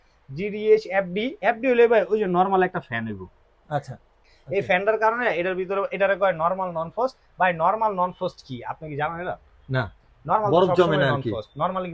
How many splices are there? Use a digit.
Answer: 0